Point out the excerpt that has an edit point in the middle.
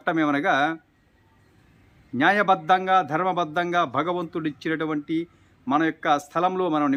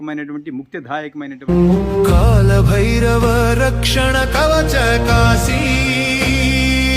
second; 1 cut; at 1.5 s

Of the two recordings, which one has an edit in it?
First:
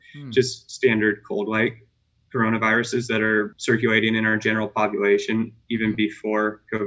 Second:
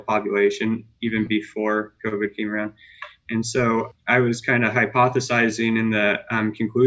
first; 1 cut; at 3.6 s

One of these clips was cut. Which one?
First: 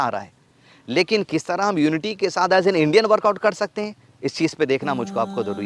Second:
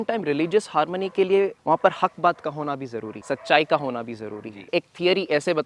second; 3 cuts; at 1.6 s, 3.1 s, 4.7 s

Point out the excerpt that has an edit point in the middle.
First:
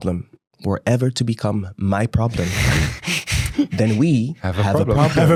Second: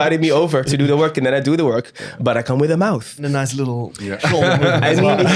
second; 1 cut; at 3.2 s

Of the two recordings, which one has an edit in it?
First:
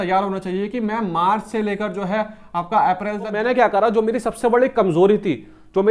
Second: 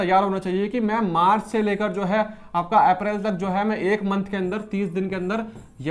first; 1 cut; at 3.4 s

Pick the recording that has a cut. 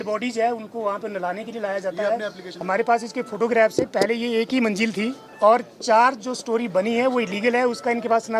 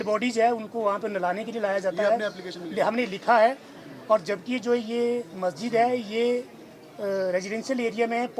first; 2 cuts; at 2.5 s, 5.2 s

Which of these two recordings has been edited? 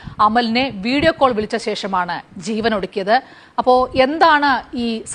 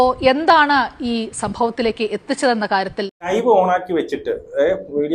second; 1 cut; at 3.3 s

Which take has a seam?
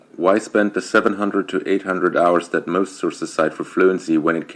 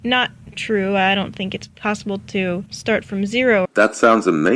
second; 2 cuts; at 2.7 s, 3.7 s

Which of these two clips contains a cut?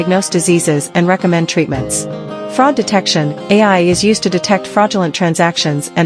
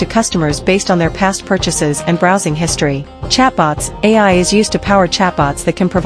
second; 1 cut; at 3.1 s

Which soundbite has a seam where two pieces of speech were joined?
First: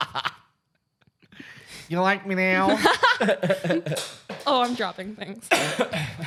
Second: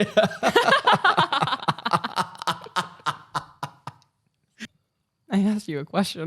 second; 1 cut; at 4.7 s

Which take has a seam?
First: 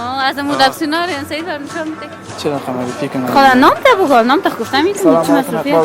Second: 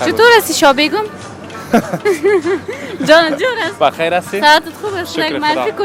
first; 1 cut; at 2.3 s

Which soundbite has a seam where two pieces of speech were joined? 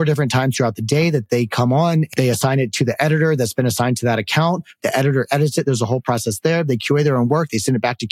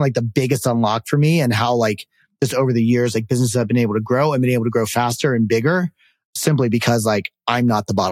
first; 3 cuts; at 1.2 s, 2.1 s, 4.8 s

